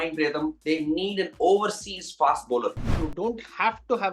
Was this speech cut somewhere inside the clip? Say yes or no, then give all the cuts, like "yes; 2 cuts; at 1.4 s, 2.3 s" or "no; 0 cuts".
yes; 1 cut; at 3.0 s